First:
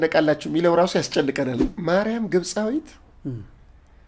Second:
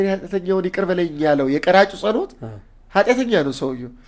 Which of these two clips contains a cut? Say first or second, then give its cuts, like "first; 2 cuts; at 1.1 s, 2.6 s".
first; 1 cut; at 1.7 s